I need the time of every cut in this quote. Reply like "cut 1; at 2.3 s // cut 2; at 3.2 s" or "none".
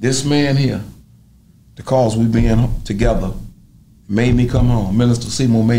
none